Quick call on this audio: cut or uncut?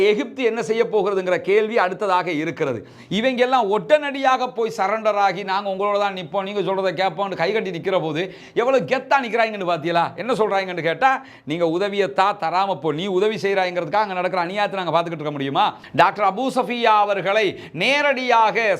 cut